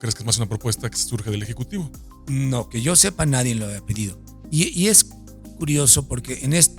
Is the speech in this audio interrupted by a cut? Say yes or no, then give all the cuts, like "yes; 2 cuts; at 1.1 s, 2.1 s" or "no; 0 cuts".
no; 0 cuts